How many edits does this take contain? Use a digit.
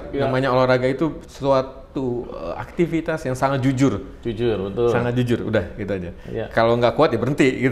1